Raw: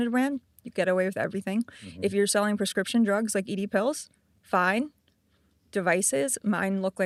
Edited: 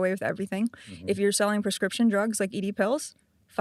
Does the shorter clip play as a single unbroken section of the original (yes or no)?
yes